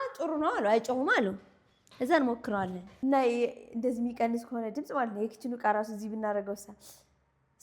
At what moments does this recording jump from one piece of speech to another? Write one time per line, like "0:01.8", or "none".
0:02.8

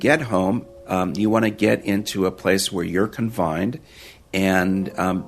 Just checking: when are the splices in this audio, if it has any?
none

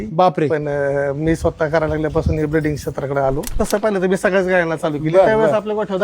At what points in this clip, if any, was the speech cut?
0:03.5

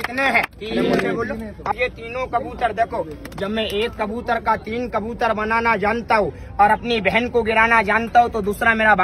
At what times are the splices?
0:01.7

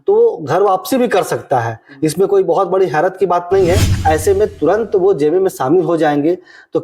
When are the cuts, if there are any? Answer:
0:03.9

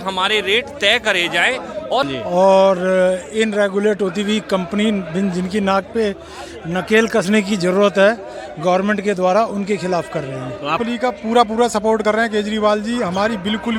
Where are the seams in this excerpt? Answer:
0:02.0
0:10.8

